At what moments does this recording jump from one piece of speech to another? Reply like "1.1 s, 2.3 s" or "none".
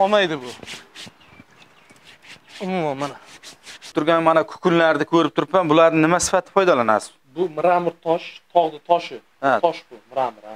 3.9 s